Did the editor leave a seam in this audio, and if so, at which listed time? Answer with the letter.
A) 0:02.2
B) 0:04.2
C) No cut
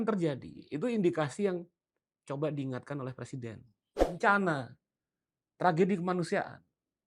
B